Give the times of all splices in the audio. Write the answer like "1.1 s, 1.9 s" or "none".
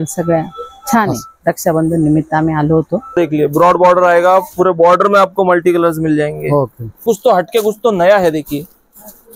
3.1 s, 7.0 s